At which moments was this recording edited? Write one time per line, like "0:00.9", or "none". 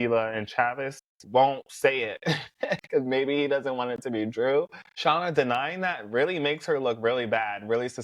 0:04.8